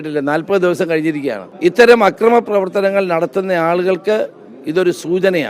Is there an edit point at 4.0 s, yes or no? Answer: no